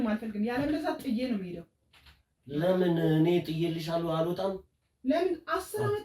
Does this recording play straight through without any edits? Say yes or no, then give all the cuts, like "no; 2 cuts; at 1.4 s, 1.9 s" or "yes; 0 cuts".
yes; 0 cuts